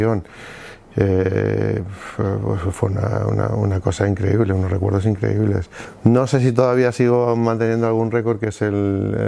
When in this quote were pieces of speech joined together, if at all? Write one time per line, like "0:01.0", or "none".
0:05.8